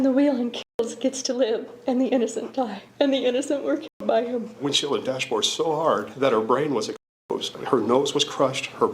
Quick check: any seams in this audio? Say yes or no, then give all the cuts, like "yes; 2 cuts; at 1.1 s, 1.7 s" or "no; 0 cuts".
yes; 4 cuts; at 2.8 s, 4.6 s, 6.1 s, 7.5 s